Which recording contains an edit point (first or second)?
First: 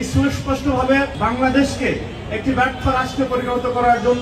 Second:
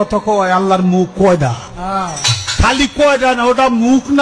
first